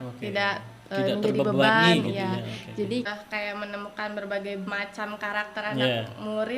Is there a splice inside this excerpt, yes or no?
yes